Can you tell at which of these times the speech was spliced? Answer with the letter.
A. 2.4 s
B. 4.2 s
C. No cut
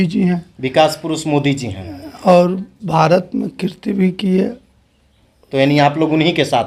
C